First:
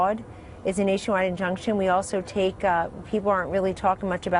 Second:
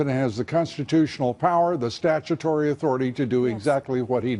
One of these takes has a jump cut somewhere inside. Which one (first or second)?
first